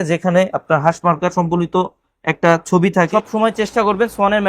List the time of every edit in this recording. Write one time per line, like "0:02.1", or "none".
0:03.1